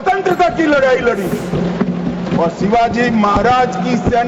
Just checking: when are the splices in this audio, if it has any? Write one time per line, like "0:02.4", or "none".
none